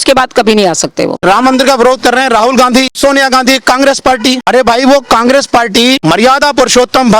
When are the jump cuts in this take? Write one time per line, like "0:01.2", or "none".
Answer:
0:01.1
0:02.9
0:04.4
0:06.0

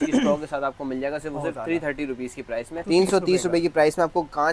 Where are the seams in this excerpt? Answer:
none

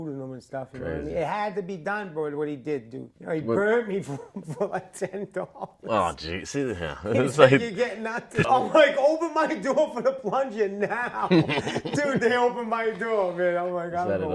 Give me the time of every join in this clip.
0:03.2
0:08.4

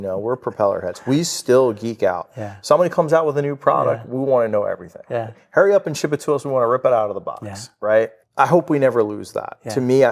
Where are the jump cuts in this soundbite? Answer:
0:08.2

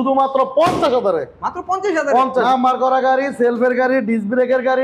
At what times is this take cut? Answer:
0:02.4

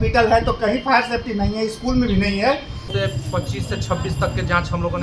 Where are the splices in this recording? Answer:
0:02.9

